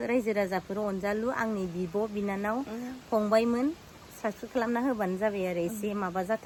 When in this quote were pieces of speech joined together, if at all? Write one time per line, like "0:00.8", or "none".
none